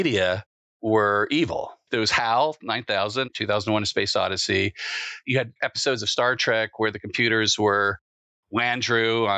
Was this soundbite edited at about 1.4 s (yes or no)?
no